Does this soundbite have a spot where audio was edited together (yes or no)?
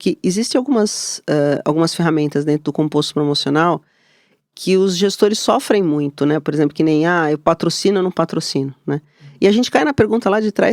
no